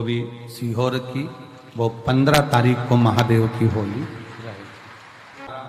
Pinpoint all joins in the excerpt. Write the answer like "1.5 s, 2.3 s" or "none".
none